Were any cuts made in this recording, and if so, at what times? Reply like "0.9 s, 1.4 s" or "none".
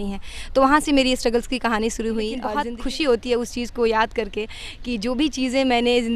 2.5 s